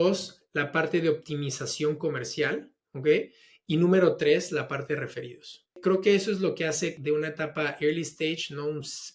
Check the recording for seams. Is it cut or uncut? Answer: cut